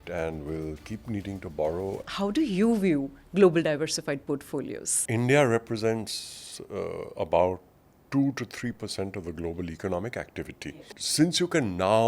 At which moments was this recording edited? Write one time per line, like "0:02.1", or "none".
0:02.1
0:04.9
0:11.0